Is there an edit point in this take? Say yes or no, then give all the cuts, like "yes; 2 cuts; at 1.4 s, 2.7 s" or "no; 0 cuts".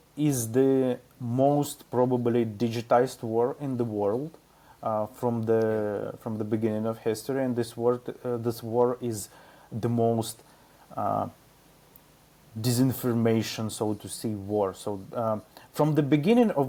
no; 0 cuts